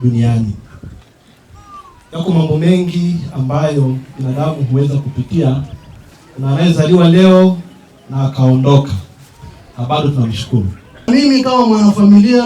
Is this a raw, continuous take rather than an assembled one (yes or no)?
no